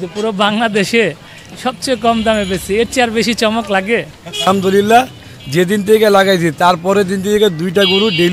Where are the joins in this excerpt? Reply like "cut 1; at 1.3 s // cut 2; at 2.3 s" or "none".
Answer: cut 1; at 4.5 s